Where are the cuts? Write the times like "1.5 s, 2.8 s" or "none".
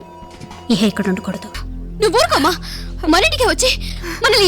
1.7 s